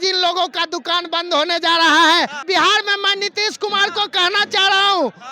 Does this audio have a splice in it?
yes; 1 cut; at 2.4 s

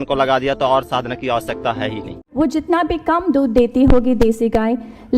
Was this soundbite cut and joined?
yes; 1 cut; at 2.2 s

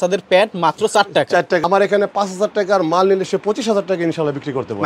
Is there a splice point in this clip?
yes; 1 cut; at 1.6 s

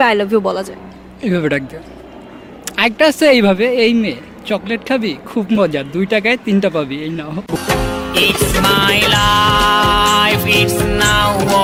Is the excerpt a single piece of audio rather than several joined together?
yes; 0 cuts

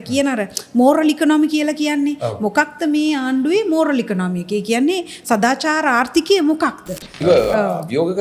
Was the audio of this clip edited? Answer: yes; 1 cut; at 7.1 s

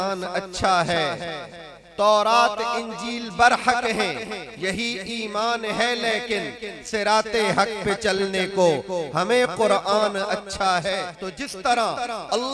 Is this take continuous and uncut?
no; 1 cut; at 11.2 s

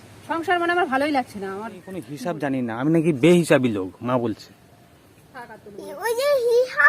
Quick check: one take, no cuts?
no; 1 cut; at 2.2 s

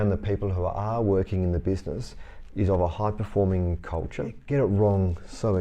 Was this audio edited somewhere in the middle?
yes; 1 cut; at 4.4 s

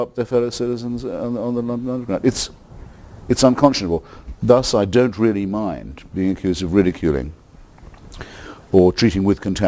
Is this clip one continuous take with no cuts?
yes; 0 cuts

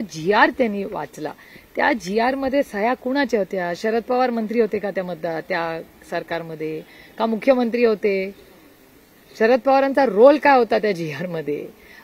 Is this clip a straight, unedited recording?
yes; 0 cuts

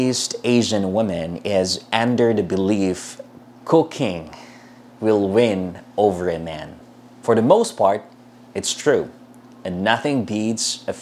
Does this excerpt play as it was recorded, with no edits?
yes; 0 cuts

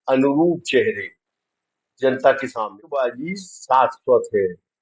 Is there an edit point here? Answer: yes; 1 cut; at 2.6 s

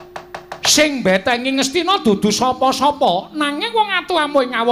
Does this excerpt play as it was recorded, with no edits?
yes; 0 cuts

